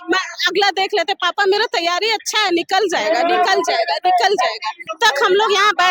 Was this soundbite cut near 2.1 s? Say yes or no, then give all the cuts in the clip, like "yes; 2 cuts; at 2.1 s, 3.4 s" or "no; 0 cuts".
no; 1 cut; at 4.8 s